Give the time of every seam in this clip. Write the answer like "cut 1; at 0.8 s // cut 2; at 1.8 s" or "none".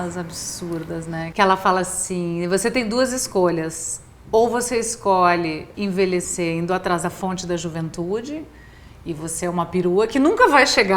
cut 1; at 1.3 s // cut 2; at 5.7 s